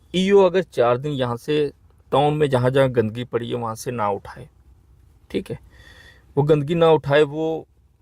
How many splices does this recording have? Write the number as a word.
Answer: zero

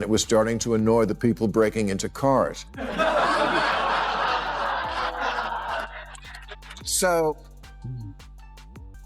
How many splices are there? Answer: one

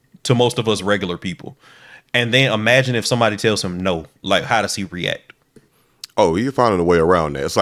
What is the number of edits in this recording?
zero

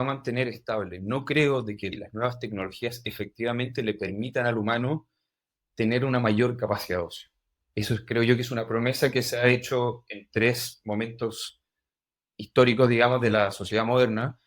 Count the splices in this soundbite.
one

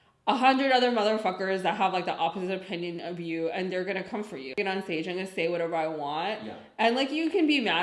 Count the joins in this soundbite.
one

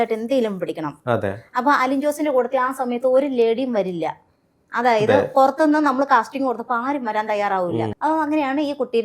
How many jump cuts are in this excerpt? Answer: one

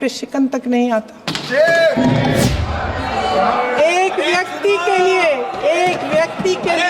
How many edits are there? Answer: one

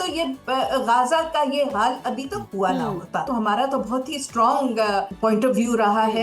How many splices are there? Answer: two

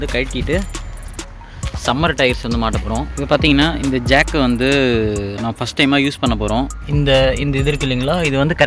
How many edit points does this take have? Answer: two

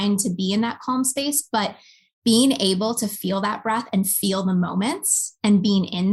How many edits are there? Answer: zero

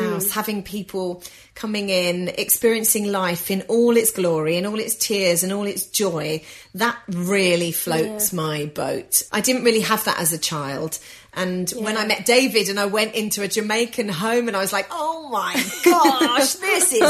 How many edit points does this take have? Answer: two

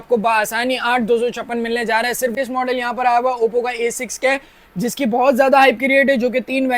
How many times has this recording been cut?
one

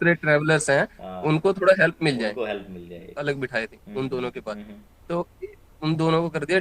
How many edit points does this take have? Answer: one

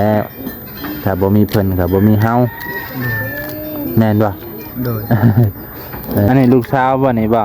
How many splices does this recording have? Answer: one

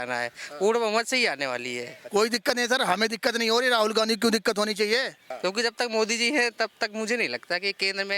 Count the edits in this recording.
two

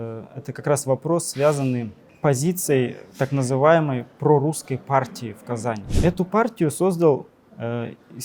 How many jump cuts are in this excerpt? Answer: two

